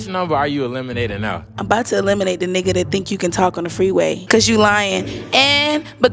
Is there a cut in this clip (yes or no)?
yes